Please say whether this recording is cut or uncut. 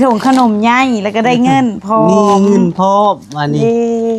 uncut